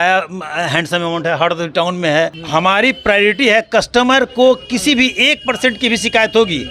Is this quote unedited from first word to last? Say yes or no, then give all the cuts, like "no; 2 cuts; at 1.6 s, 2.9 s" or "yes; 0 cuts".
no; 1 cut; at 2.4 s